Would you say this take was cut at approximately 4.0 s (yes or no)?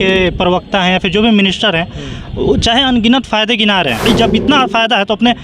yes